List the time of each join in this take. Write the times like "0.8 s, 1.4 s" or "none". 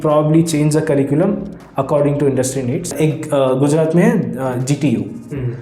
3.0 s